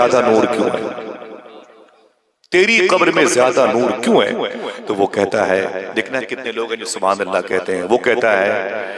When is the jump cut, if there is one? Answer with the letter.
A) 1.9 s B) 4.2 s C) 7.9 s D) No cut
D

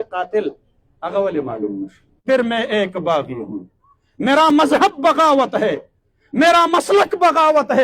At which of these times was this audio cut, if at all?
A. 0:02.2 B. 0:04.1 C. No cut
A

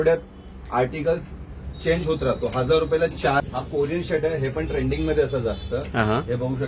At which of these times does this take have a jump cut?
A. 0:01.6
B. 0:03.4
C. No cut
B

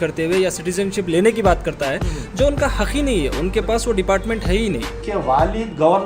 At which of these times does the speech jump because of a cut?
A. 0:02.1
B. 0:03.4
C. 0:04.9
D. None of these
C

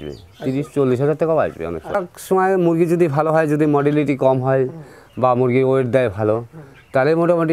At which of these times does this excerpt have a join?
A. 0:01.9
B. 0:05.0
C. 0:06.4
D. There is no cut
A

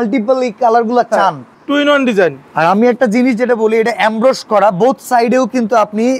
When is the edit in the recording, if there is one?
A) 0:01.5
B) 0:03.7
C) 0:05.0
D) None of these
A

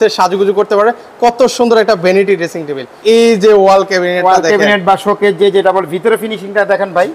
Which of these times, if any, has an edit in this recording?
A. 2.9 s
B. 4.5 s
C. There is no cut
A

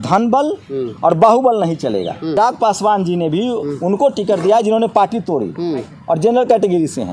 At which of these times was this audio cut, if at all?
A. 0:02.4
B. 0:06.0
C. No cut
A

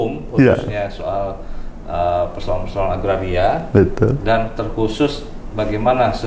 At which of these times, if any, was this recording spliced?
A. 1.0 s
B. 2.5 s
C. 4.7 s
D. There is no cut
D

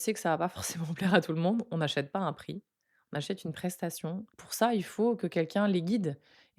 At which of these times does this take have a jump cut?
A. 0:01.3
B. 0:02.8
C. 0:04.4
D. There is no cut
C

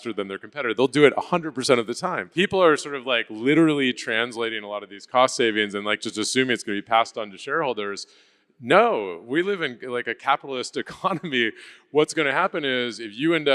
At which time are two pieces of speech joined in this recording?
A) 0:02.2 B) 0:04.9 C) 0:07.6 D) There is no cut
A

